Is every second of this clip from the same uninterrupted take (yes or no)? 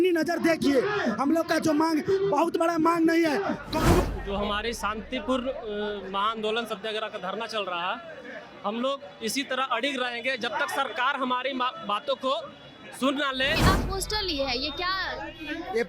no